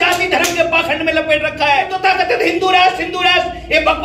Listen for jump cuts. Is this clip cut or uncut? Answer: cut